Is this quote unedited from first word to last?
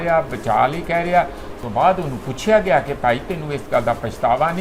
no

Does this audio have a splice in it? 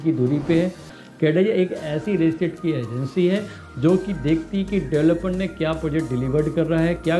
yes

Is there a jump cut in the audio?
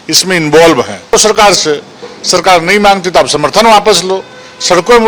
no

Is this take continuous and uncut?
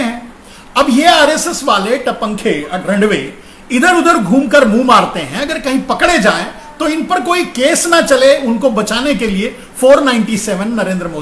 yes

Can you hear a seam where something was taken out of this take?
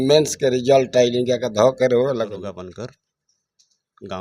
yes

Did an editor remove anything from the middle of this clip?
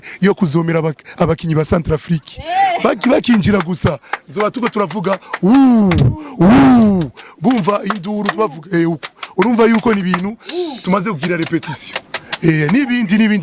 no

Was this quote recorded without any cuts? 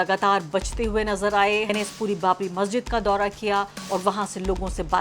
no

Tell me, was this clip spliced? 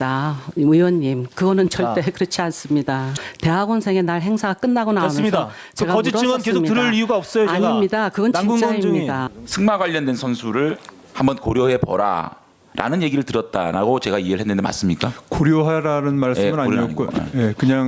no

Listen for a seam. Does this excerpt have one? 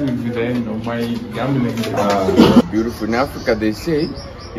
yes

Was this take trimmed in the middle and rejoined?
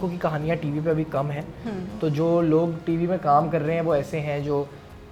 no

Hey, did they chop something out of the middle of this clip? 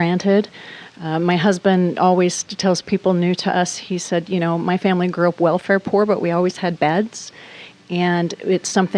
no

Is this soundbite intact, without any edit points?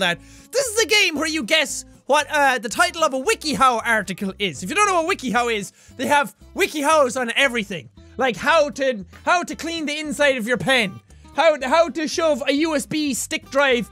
yes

